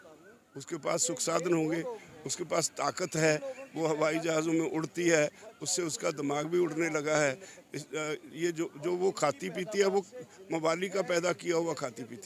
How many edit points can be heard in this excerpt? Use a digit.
0